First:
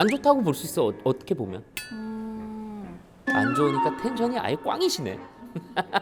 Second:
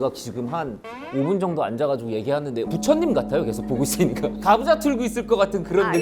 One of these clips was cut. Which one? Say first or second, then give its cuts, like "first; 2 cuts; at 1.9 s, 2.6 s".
second; 2 cuts; at 2.7 s, 4.4 s